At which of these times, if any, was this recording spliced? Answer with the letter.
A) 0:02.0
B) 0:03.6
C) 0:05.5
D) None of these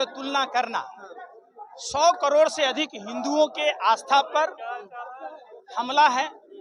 D